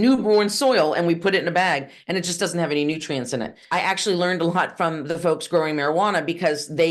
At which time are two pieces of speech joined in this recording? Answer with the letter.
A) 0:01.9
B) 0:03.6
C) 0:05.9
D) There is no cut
B